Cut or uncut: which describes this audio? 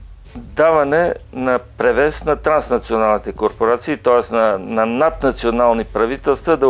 uncut